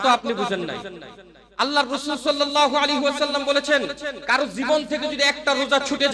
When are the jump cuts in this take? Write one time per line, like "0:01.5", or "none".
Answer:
none